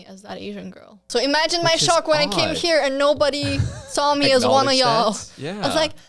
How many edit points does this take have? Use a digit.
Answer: 1